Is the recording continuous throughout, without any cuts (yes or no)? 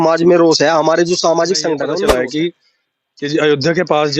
no